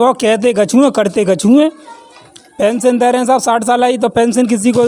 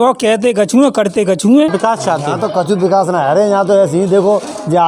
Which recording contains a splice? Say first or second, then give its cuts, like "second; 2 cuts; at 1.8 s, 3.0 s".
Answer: second; 1 cut; at 1.7 s